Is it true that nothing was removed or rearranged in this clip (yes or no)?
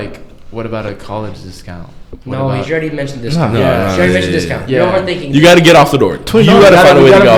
yes